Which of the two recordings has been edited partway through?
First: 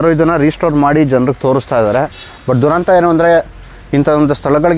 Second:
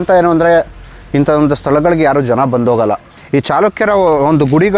second; 1 cut; at 3.1 s

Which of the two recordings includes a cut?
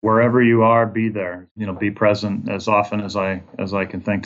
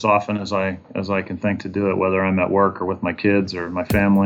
first; 1 cut; at 1.6 s

